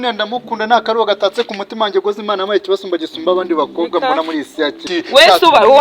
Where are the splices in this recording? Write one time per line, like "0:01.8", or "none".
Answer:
0:04.8